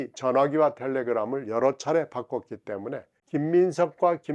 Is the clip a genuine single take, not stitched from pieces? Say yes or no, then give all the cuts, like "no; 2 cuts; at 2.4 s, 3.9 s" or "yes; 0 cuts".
no; 1 cut; at 3.1 s